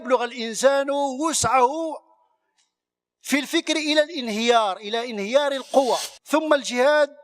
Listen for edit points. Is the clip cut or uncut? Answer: cut